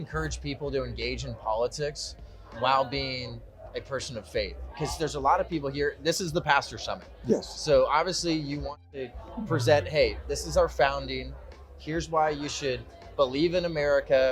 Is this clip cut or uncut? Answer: uncut